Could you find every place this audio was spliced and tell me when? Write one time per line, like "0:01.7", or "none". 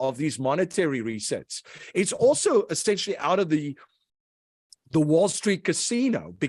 none